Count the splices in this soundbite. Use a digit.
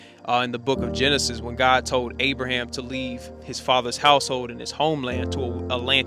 0